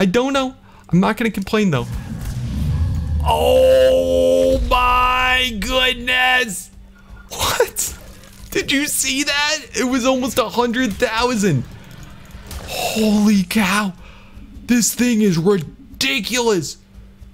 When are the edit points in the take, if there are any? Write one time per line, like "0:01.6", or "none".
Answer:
0:02.0